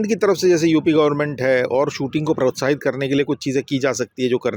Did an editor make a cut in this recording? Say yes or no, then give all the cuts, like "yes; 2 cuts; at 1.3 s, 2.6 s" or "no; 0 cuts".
no; 0 cuts